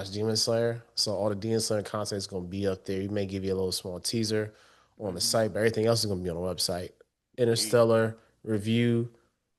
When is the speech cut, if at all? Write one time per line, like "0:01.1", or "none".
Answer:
none

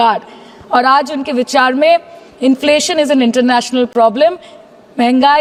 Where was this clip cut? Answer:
none

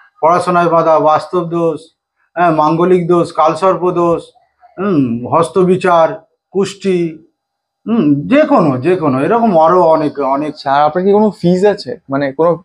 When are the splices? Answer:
0:10.6

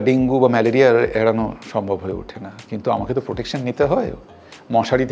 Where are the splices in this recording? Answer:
none

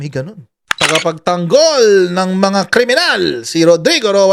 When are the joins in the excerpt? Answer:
0:00.9

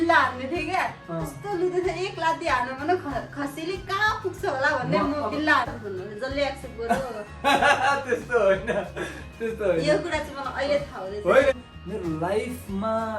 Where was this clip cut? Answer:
0:05.7
0:11.5

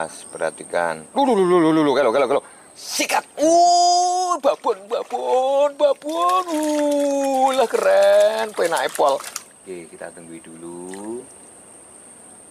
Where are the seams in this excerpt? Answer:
0:09.4

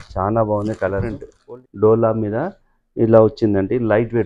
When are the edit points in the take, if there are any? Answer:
0:01.3

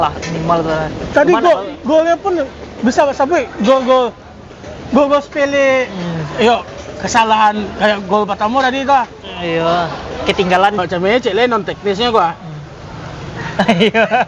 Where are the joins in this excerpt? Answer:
0:10.8

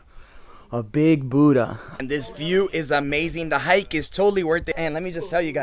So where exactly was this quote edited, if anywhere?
0:02.0
0:04.7

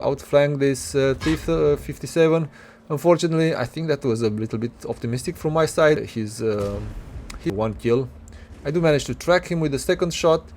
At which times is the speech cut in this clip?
0:06.0
0:07.5

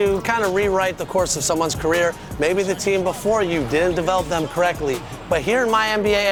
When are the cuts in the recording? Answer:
none

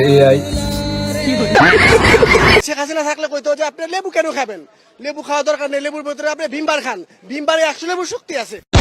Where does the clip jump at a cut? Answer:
0:02.6

